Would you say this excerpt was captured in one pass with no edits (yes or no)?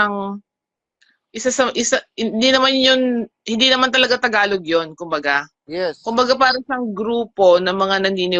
yes